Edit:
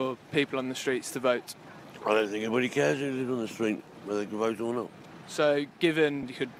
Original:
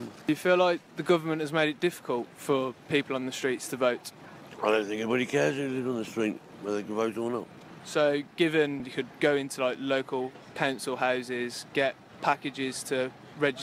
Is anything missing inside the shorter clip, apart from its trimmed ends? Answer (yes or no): no